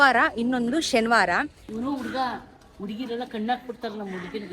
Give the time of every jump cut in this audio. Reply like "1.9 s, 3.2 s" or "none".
1.6 s